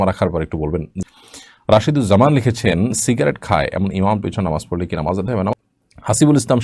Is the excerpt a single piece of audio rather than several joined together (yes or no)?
no